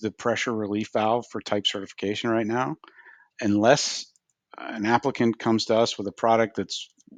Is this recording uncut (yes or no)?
yes